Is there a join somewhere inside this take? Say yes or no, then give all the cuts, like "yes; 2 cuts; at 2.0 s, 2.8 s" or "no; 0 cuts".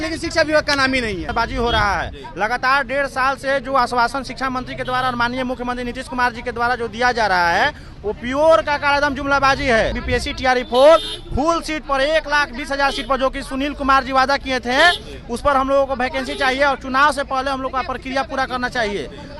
yes; 2 cuts; at 1.3 s, 10.0 s